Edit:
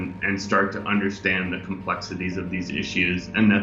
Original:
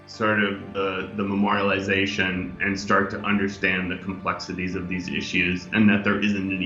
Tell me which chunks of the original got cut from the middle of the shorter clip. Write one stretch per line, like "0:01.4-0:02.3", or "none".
none